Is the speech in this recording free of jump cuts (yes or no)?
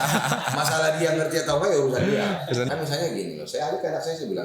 no